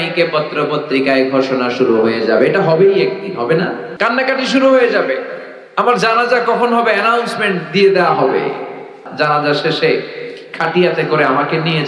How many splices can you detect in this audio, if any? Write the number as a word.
two